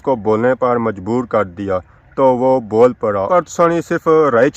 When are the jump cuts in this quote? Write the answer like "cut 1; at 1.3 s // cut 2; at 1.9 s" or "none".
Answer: cut 1; at 3.2 s